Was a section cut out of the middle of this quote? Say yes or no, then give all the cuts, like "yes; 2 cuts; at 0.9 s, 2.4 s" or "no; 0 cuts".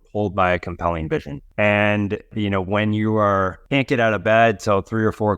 yes; 3 cuts; at 1.4 s, 2.3 s, 3.6 s